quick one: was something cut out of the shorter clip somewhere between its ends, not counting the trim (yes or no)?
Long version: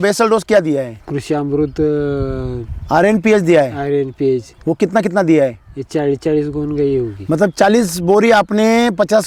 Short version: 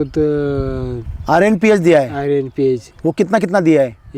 no